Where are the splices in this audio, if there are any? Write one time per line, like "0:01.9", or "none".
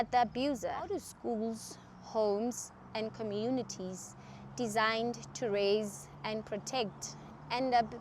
0:01.1